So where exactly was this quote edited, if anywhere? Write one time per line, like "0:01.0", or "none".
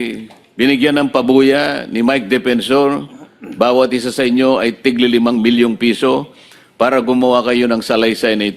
none